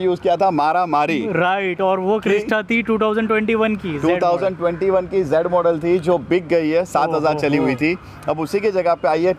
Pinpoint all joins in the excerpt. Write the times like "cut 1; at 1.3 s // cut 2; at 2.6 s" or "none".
none